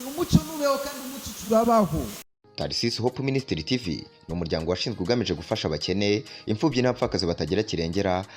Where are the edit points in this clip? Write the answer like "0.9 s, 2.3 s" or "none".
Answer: 2.1 s